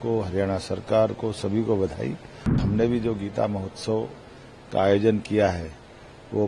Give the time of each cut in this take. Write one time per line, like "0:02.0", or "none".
0:02.6